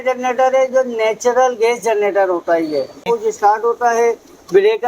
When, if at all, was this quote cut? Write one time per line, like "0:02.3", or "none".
0:03.0